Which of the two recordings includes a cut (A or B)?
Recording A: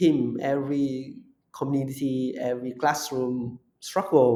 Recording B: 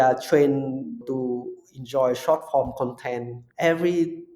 B